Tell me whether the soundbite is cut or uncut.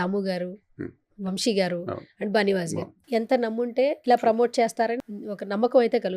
cut